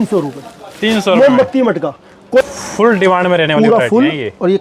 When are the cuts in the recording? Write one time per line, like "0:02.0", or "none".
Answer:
0:02.4